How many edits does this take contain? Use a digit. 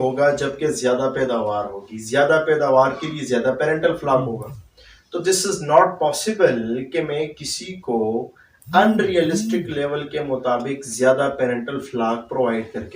0